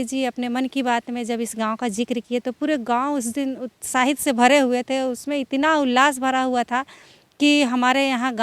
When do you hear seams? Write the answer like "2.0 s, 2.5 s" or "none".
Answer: none